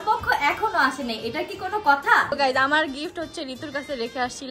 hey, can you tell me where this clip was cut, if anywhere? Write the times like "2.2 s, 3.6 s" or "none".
2.3 s